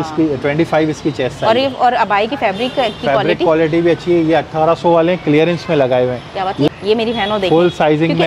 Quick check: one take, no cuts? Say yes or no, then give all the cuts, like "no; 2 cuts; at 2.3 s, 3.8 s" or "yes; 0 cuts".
yes; 0 cuts